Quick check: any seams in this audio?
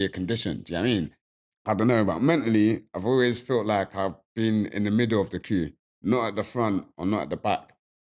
yes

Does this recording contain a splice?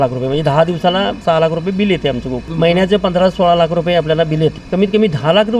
yes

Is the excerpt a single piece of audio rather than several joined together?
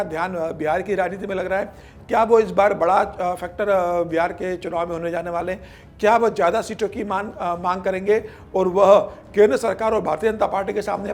yes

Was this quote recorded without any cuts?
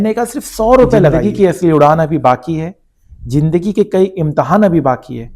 no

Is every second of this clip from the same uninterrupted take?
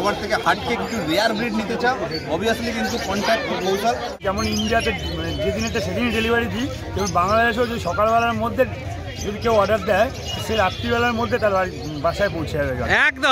no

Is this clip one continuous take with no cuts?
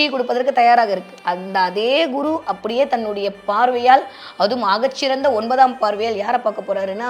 yes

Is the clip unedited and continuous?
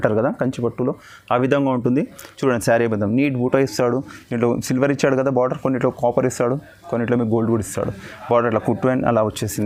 yes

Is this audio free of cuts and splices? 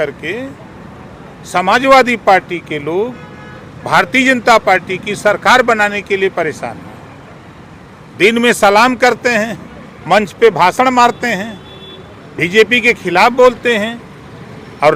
yes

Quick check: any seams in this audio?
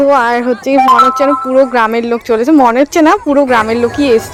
no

